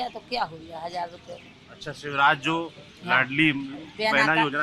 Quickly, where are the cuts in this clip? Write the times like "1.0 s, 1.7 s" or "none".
none